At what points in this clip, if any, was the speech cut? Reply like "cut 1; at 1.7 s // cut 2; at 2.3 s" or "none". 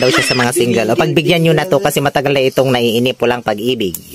none